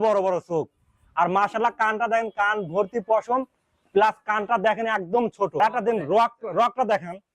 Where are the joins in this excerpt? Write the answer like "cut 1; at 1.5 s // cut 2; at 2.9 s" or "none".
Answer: cut 1; at 5.6 s